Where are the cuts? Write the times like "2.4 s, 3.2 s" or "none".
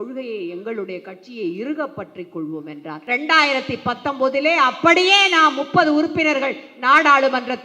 3.0 s